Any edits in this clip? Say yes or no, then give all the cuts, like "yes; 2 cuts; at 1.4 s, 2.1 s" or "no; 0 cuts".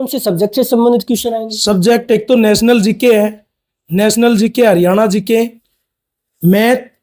yes; 1 cut; at 5.7 s